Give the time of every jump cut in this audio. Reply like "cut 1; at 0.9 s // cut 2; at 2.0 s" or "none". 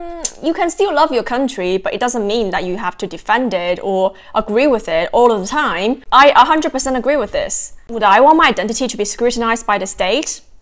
cut 1; at 6.0 s